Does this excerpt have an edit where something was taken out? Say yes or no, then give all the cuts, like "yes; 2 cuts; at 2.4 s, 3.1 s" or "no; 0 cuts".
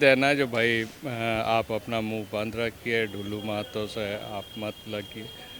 no; 0 cuts